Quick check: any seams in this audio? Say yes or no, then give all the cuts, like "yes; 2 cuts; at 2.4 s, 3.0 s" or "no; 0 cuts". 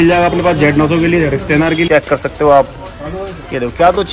yes; 1 cut; at 1.9 s